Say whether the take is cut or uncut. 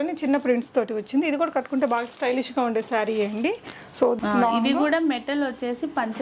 cut